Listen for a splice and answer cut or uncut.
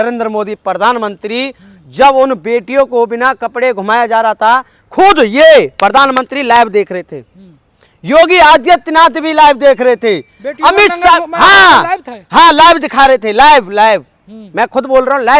uncut